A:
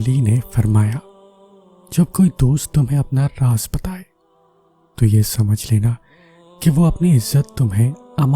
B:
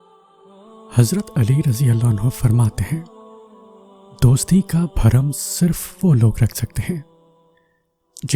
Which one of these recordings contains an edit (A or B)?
B